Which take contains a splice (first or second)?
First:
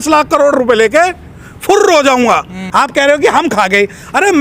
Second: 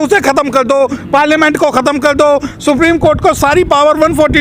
first